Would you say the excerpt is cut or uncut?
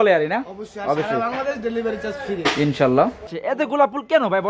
cut